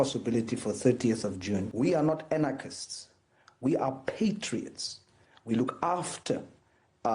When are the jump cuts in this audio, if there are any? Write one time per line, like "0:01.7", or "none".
0:01.7